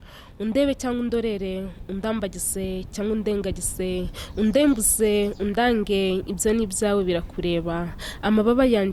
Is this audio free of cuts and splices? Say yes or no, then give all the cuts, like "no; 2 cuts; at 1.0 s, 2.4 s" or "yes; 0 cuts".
yes; 0 cuts